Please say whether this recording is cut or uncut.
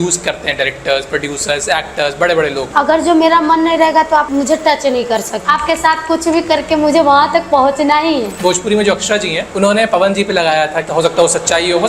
cut